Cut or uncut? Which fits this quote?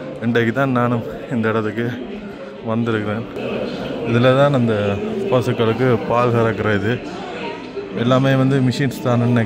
cut